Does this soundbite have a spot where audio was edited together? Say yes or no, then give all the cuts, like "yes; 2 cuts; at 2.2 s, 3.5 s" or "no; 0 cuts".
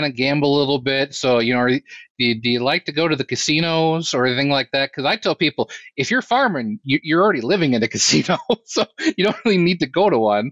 no; 0 cuts